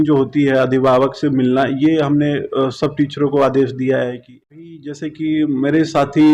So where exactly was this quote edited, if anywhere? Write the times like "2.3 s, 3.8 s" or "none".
4.4 s